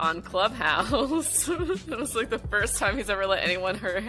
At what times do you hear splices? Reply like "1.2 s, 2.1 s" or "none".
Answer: none